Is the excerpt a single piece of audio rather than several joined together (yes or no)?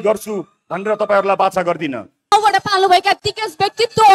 no